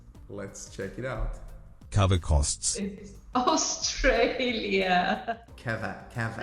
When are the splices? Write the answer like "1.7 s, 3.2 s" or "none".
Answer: 5.5 s